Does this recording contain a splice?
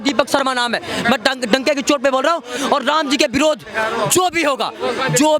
yes; 1 cut; at 2.6 s

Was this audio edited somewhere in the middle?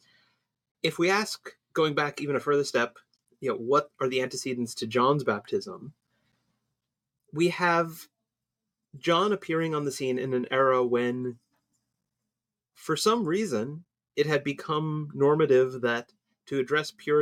no; 0 cuts

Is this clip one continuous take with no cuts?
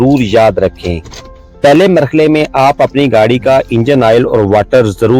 yes; 0 cuts

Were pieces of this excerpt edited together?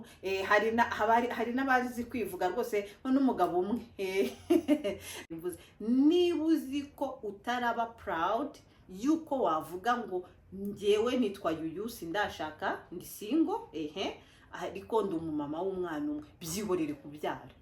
yes; 1 cut; at 5.3 s

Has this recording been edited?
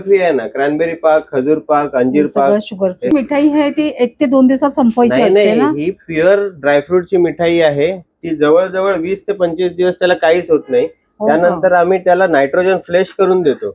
yes; 1 cut; at 3.1 s

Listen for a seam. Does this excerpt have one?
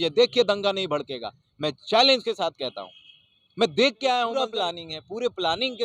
yes; 1 cut; at 4.4 s

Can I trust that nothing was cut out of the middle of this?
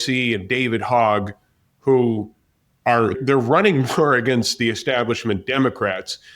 no; 1 cut; at 3.2 s

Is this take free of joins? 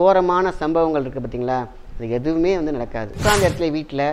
no; 1 cut; at 3.2 s

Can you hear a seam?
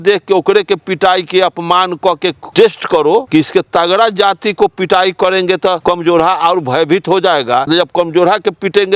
yes; 4 cuts; at 2.4 s, 3.3 s, 5.8 s, 7.7 s

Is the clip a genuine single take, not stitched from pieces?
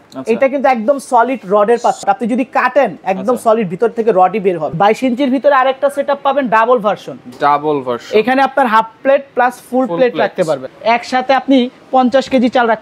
no; 3 cuts; at 2.0 s, 4.7 s, 10.6 s

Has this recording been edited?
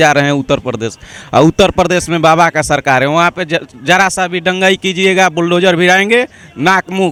no; 0 cuts

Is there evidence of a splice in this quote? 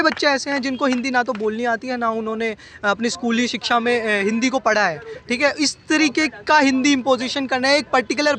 no; 0 cuts

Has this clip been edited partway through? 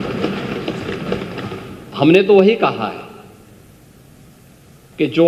no; 0 cuts

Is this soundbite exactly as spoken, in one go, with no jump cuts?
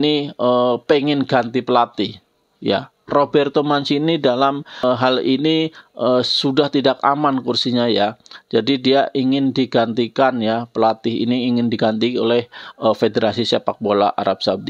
no; 1 cut; at 4.8 s

